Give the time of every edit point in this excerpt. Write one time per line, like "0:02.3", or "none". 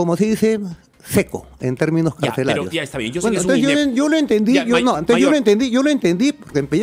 none